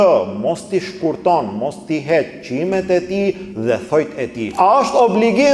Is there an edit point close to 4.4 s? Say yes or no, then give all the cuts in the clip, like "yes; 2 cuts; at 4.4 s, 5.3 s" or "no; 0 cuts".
yes; 1 cut; at 4.4 s